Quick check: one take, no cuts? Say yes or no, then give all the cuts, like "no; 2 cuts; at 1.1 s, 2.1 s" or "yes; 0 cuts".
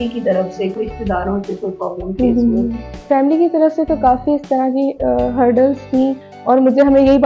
no; 3 cuts; at 0.8 s, 2.9 s, 6.3 s